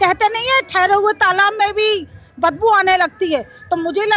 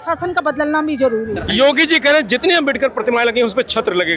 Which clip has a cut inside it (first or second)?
second